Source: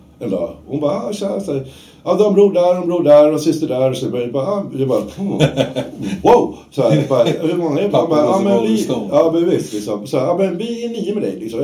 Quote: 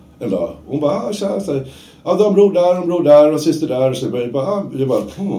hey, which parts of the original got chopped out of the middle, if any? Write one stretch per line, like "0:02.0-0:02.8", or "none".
none

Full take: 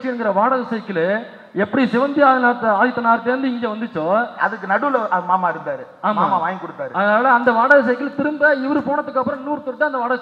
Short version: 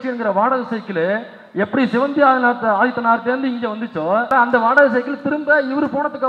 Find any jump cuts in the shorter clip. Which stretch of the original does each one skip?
0:04.3-0:07.2

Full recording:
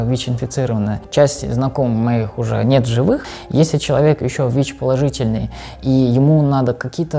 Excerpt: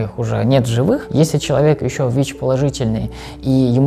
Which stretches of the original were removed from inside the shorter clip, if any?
0:03.3-0:03.5

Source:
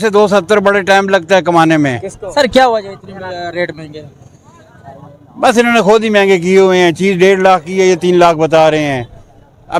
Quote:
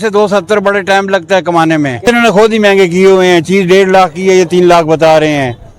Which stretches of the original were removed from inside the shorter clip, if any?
0:02.0-0:05.5

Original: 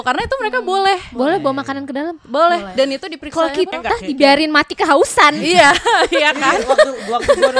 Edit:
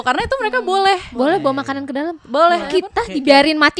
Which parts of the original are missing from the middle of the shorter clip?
0:02.7-0:03.7

